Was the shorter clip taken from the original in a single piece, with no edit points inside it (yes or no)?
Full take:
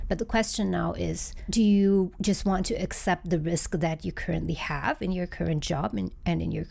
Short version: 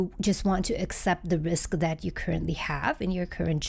yes